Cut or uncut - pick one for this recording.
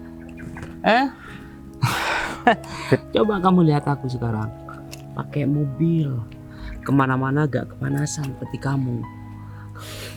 uncut